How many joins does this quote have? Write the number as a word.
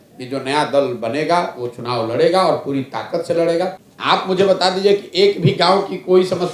one